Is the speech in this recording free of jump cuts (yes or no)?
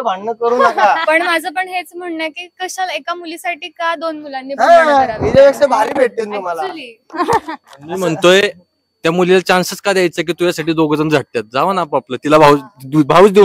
yes